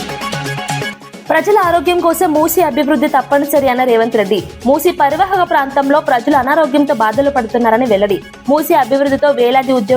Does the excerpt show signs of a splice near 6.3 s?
no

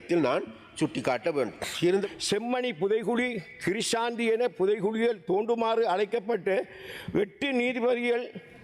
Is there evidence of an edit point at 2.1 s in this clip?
yes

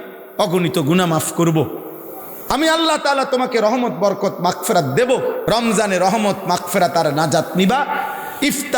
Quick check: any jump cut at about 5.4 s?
yes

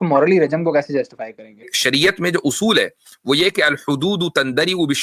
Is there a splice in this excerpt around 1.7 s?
yes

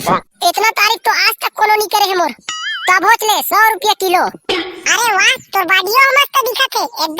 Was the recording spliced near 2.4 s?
yes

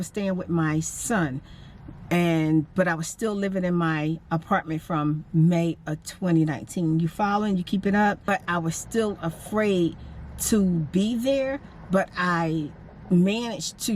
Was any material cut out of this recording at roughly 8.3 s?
yes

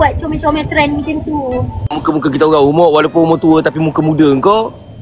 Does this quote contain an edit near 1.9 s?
yes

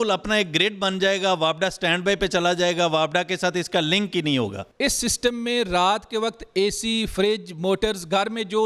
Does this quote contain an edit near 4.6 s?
yes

